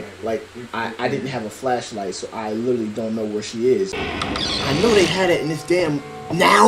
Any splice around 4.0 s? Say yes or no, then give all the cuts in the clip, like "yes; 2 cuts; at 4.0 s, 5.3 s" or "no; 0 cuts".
yes; 1 cut; at 4.0 s